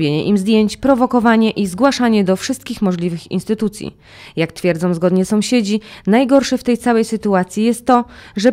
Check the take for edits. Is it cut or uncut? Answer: uncut